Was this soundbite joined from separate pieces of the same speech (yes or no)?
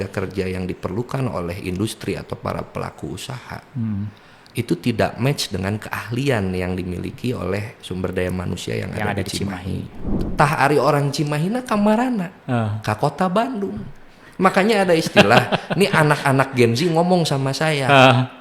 yes